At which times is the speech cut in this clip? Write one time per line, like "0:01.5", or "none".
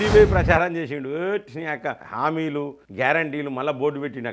0:02.0

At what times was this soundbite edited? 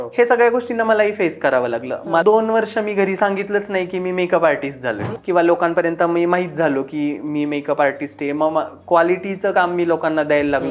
0:02.2
0:05.1

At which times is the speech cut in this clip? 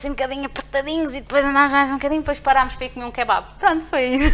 none

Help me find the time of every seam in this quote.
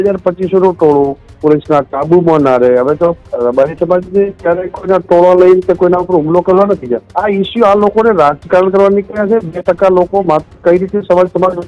0:03.3
0:07.1

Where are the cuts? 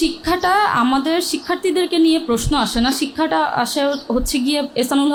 none

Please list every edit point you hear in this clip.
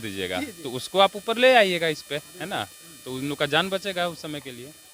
none

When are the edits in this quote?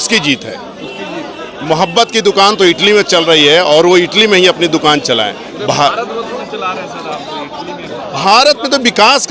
none

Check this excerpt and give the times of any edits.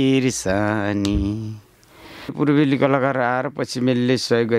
0:02.3

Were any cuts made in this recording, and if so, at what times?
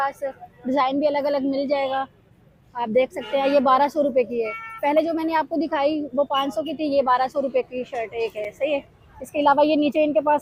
none

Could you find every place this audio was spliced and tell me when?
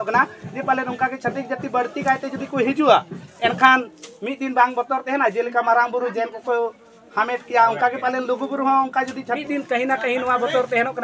0:09.4

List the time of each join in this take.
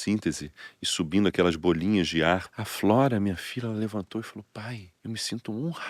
0:02.6
0:04.9

